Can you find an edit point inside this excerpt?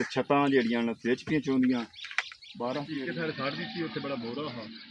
yes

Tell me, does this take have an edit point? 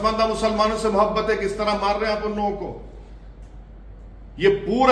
no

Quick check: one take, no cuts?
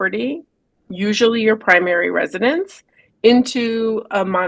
yes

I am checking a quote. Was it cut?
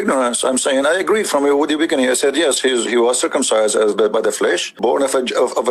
yes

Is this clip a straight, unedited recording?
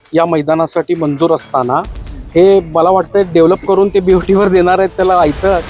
yes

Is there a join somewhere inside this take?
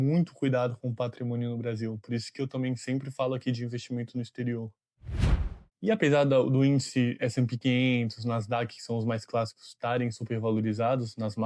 yes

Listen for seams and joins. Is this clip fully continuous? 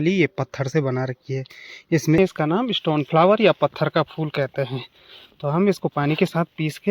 no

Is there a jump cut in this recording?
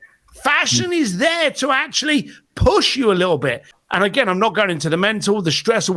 yes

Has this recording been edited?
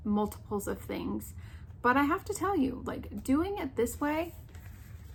no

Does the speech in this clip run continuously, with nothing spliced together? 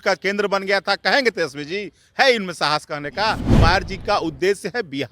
no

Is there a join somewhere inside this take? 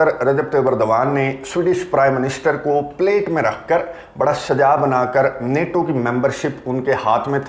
no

